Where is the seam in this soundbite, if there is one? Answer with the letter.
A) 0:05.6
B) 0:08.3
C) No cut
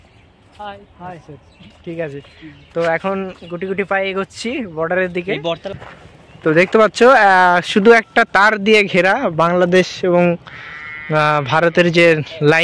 A